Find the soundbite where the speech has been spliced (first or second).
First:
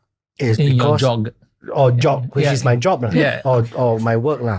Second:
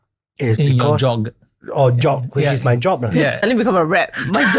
second